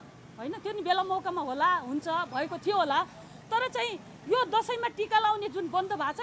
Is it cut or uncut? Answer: uncut